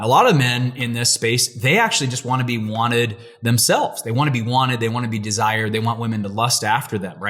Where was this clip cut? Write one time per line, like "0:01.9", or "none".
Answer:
none